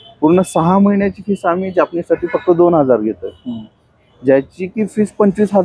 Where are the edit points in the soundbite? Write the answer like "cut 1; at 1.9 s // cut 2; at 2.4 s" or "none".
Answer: none